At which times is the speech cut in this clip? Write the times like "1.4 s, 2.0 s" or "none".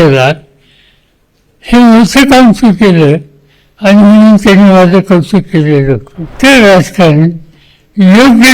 6.4 s